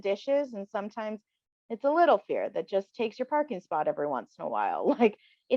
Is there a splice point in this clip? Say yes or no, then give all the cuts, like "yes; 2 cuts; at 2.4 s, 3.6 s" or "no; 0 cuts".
no; 0 cuts